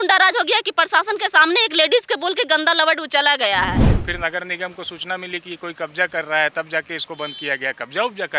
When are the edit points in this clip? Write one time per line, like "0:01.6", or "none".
0:03.9